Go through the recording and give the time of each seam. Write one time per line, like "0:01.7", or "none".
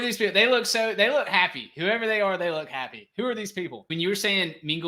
0:03.9